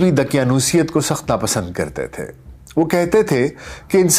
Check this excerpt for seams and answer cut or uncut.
uncut